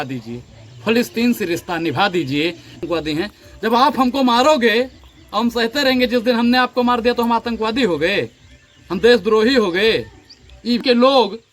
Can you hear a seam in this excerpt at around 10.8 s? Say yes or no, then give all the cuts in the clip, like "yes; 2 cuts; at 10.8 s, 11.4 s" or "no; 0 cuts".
yes; 2 cuts; at 2.8 s, 10.8 s